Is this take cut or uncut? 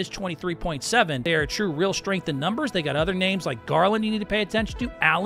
cut